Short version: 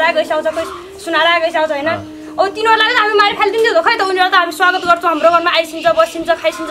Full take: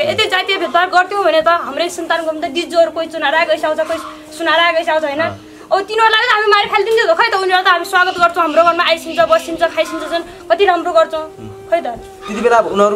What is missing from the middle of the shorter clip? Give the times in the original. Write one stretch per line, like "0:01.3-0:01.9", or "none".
none